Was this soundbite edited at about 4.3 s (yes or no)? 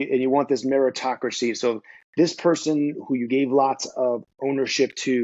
yes